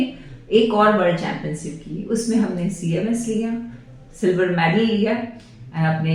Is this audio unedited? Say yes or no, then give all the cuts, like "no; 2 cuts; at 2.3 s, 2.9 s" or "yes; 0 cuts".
yes; 0 cuts